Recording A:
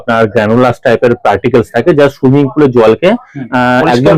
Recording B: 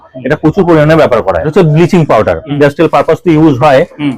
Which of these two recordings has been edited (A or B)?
B